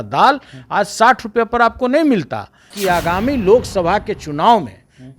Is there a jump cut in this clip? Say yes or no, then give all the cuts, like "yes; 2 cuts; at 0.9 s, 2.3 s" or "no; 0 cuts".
yes; 1 cut; at 2.7 s